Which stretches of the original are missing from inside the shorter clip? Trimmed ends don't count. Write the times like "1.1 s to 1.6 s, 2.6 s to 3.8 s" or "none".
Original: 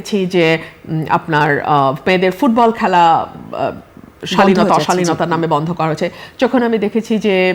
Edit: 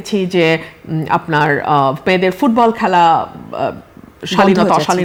none